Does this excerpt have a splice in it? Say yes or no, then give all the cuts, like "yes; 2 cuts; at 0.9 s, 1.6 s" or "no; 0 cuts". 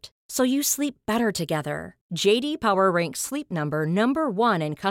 no; 0 cuts